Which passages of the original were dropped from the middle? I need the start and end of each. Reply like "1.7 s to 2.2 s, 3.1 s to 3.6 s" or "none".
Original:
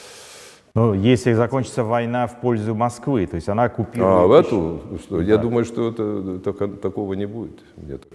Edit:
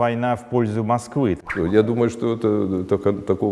3.4 s to 5.0 s